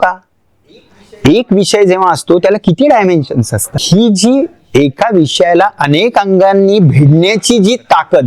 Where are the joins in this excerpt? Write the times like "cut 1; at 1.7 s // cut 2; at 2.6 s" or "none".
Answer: cut 1; at 3.8 s